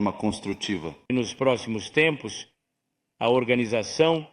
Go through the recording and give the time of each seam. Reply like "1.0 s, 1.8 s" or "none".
0.9 s